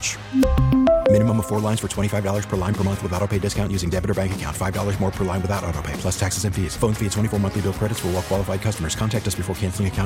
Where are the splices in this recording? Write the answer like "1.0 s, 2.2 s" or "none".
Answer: none